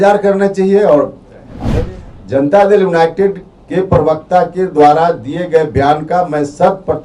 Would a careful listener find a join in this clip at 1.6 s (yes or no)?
yes